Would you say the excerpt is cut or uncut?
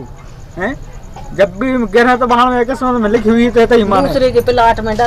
uncut